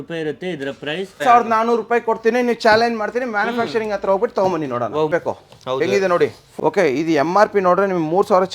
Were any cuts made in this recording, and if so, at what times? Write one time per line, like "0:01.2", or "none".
0:01.2
0:05.1
0:06.4